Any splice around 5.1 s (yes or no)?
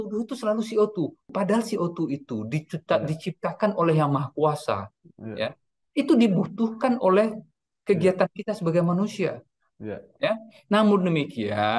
no